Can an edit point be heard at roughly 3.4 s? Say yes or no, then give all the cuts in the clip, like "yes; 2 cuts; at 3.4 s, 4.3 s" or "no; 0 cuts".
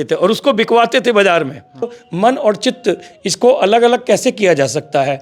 no; 1 cut; at 2.0 s